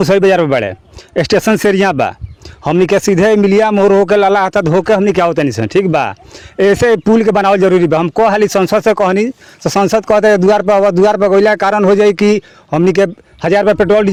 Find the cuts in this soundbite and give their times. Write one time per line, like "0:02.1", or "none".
none